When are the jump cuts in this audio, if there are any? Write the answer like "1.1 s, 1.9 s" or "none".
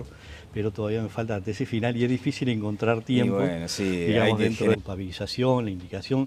none